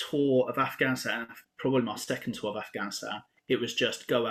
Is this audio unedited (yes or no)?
yes